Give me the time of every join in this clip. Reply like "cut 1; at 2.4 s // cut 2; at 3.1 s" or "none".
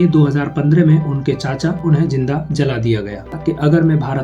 cut 1; at 1.7 s // cut 2; at 3.3 s